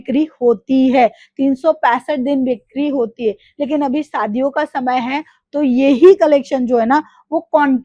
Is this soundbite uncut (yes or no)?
yes